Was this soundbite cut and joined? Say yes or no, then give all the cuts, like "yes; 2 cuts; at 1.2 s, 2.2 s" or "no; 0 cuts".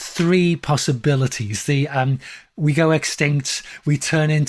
no; 0 cuts